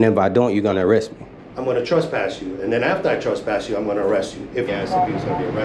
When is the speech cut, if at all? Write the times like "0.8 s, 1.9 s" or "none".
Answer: 4.7 s